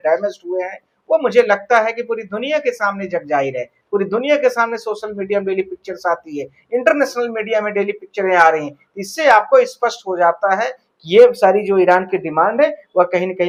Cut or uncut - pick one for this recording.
uncut